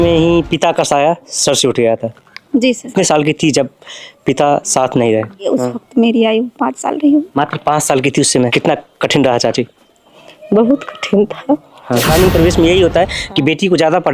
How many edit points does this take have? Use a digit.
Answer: 3